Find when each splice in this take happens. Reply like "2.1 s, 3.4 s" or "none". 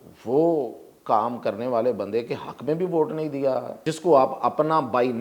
3.7 s